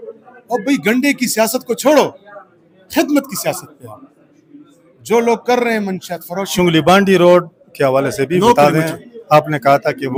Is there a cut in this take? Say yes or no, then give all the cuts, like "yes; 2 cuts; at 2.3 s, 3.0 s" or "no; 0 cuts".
no; 0 cuts